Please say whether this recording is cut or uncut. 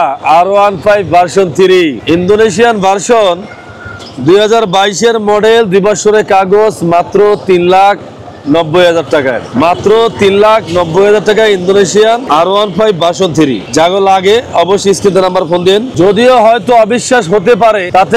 uncut